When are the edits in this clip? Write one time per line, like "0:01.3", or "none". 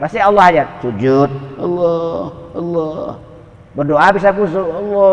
none